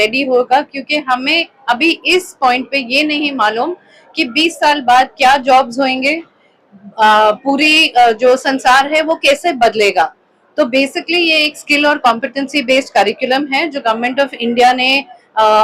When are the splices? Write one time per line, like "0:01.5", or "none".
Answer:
none